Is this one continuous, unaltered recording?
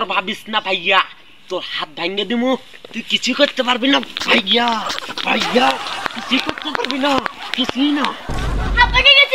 yes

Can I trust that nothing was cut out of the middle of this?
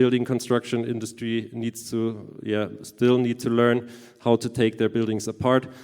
yes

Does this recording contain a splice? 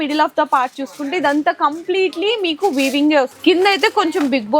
yes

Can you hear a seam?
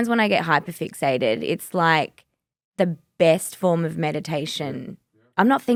no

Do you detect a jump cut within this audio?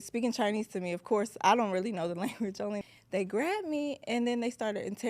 yes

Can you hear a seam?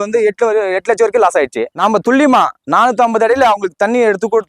yes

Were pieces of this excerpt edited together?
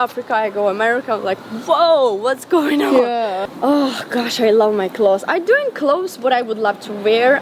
yes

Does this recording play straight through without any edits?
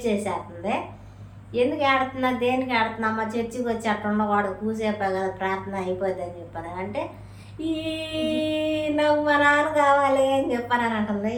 yes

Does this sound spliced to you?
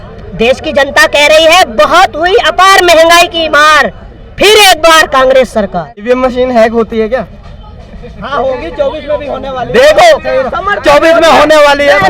yes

